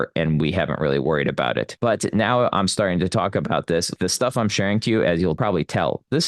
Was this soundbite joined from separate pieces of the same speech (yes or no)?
yes